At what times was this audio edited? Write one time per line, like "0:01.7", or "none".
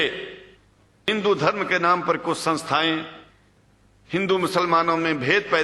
0:01.1